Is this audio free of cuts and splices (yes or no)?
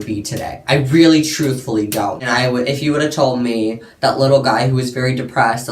no